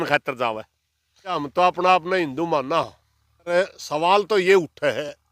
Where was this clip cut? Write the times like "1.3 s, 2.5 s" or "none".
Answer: 1.4 s, 3.5 s